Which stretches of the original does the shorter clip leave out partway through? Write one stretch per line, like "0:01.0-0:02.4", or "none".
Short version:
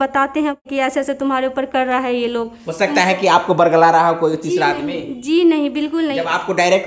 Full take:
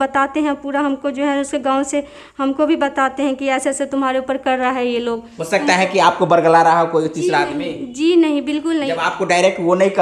0:00.9-0:03.7